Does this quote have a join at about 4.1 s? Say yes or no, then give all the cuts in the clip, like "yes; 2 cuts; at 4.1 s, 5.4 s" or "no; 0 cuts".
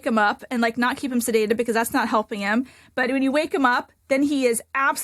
no; 0 cuts